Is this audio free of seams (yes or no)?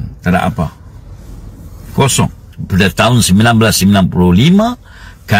no